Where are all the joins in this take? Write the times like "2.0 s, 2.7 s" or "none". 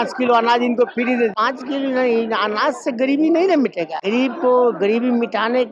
1.4 s, 4.0 s